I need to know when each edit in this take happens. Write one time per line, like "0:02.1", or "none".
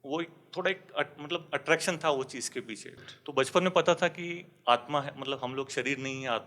0:03.1